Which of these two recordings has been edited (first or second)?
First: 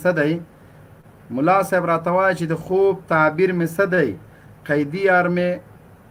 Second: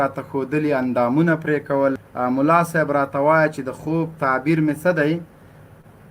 second